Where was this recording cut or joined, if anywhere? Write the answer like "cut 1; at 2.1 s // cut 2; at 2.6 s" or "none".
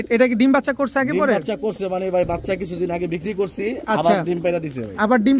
none